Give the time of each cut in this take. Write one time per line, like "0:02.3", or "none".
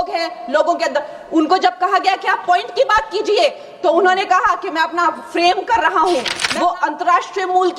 0:06.4

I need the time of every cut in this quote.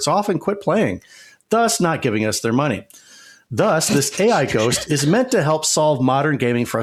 none

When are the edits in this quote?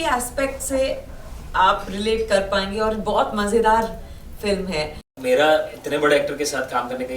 0:05.1

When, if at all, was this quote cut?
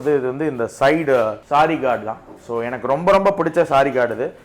0:01.4

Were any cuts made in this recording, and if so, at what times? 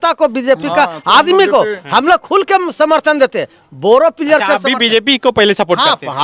none

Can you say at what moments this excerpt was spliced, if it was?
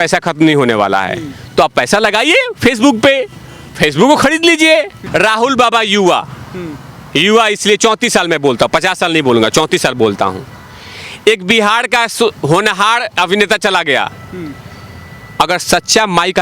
0:05.0

